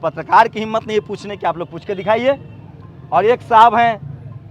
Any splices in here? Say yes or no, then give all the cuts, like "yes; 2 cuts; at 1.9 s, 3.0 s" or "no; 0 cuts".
no; 0 cuts